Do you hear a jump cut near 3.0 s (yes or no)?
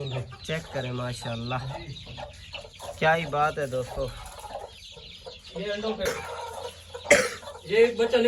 no